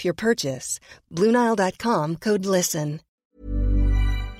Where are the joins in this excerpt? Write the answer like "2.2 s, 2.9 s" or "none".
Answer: 3.2 s